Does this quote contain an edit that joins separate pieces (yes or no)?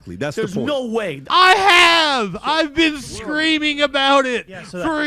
no